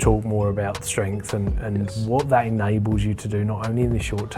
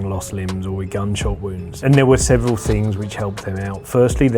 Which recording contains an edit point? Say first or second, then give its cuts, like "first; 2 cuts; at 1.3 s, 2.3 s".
second; 1 cut; at 1.8 s